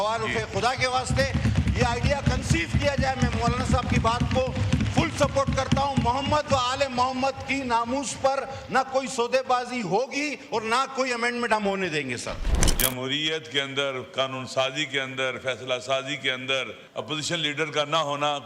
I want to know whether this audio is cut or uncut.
cut